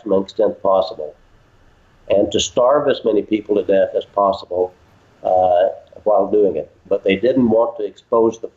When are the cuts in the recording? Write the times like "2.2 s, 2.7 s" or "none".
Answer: 6.8 s